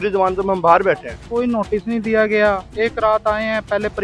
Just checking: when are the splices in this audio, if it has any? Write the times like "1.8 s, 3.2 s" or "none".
1.2 s, 2.7 s